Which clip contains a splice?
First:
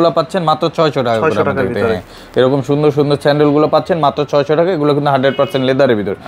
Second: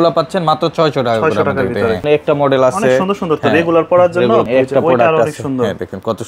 second; 2 cuts; at 2.0 s, 4.5 s

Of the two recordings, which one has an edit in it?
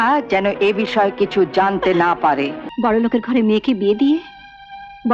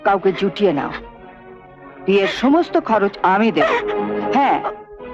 first; 1 cut; at 2.6 s

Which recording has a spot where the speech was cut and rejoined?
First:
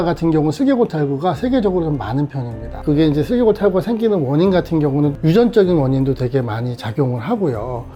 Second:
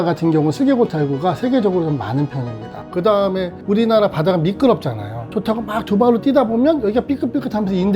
second; 2 cuts; at 2.8 s, 5.3 s

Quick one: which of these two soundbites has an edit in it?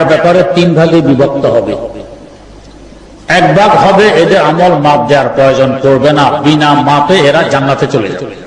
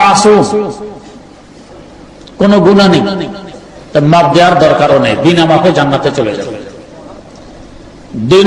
second; 1 cut; at 1.7 s

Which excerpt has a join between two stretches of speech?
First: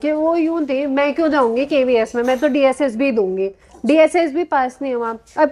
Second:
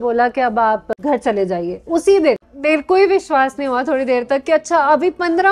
second; 2 cuts; at 0.9 s, 2.5 s

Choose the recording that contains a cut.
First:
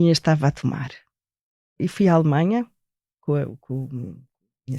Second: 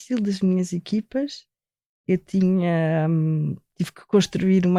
first; 2 cuts; at 1.7 s, 3.2 s

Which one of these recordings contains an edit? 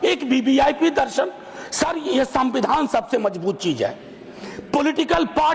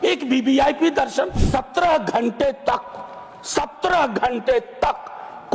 second; 1 cut; at 1.4 s

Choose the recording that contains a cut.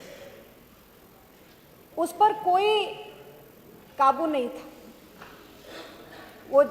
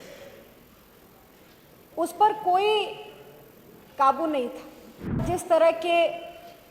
second; 1 cut; at 5.2 s

